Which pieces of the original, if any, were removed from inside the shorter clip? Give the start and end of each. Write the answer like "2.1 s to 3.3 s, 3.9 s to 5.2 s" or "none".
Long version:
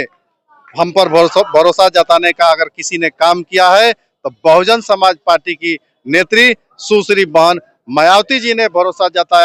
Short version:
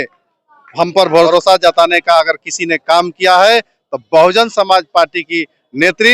1.3 s to 1.6 s

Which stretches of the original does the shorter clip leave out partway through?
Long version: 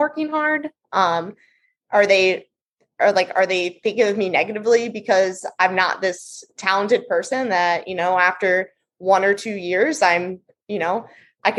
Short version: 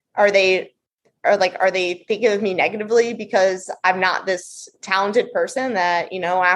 none

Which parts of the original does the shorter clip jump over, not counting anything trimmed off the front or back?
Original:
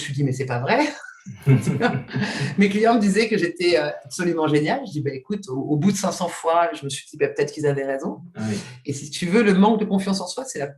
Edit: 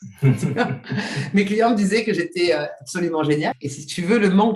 4.8 s to 8.8 s

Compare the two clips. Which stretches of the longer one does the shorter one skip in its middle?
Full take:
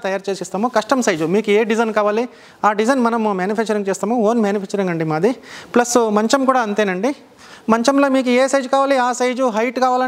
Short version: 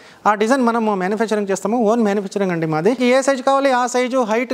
5.4 s to 8.2 s

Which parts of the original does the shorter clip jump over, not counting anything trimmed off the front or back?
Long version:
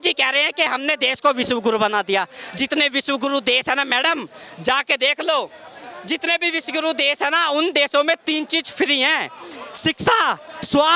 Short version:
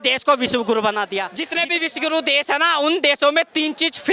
2.3 s to 6.1 s

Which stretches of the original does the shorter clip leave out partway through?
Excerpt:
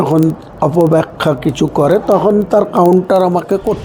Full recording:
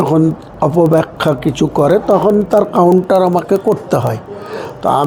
none

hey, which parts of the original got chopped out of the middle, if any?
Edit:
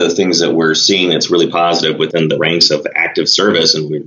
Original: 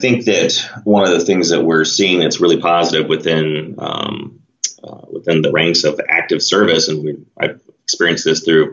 3.2 s to 5.2 s

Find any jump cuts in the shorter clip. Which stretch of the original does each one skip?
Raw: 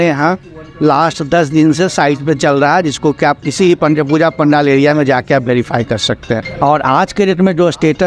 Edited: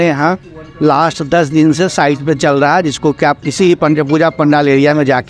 none

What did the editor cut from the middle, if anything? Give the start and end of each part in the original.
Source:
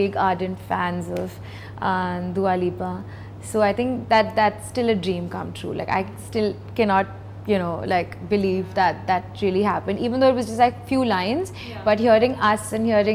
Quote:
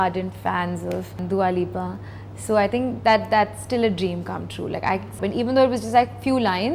1.4 s to 2.2 s, 6.2 s to 9.8 s

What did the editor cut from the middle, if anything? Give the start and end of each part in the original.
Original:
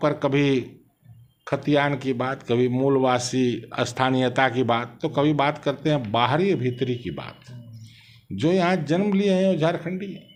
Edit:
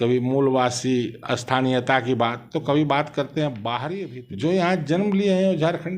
6.4 s to 7.9 s

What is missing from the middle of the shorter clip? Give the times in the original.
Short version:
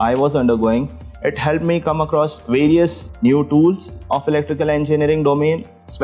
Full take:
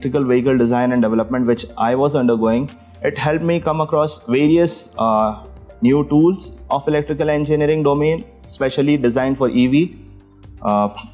4.8 s to 5.6 s

